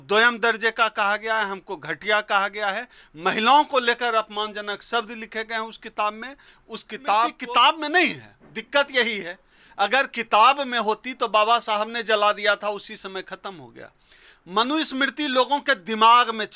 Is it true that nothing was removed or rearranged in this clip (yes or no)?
no